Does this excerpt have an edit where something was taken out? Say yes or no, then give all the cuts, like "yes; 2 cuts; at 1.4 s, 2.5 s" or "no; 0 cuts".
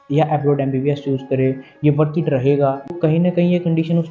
yes; 1 cut; at 2.9 s